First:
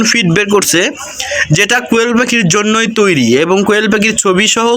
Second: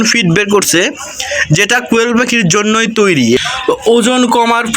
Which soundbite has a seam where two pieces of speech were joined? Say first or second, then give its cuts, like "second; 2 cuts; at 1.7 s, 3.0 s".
second; 1 cut; at 3.4 s